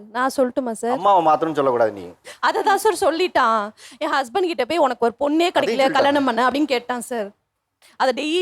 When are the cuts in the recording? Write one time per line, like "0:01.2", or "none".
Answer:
none